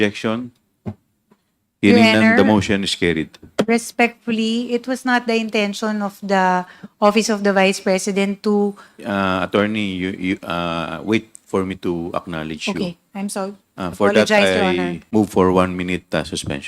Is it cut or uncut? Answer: cut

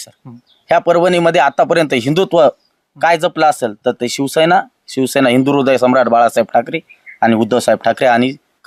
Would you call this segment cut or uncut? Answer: uncut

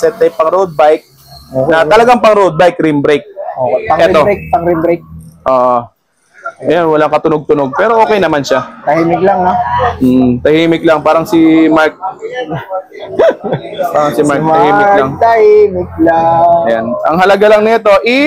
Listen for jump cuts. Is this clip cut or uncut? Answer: uncut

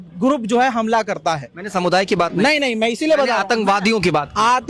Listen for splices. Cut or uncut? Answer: uncut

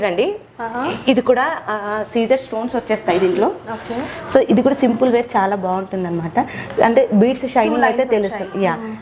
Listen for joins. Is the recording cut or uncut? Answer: uncut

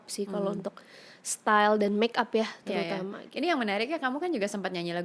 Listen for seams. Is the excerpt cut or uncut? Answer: uncut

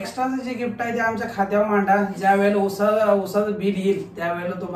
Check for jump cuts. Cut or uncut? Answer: uncut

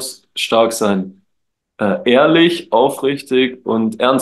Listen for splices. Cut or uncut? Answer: uncut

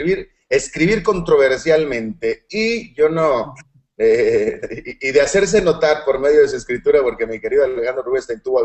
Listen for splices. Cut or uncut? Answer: uncut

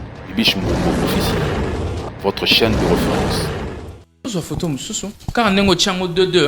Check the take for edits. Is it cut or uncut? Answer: cut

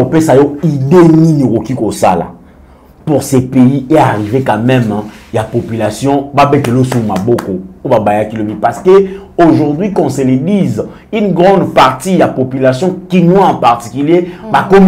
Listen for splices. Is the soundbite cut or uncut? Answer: uncut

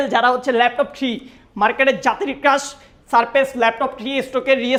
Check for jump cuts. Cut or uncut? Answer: uncut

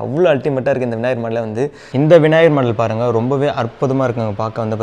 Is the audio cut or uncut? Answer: cut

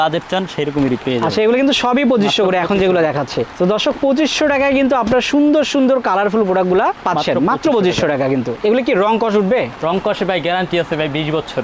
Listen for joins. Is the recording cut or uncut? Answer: cut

